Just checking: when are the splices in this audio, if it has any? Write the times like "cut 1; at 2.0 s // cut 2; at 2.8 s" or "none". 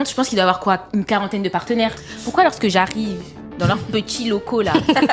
none